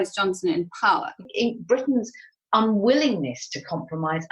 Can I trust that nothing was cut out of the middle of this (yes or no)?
no